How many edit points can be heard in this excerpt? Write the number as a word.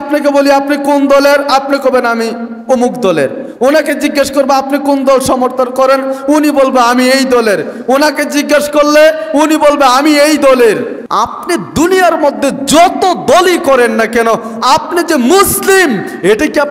one